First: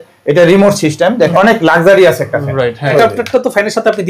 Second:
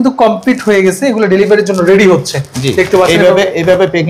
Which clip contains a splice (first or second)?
first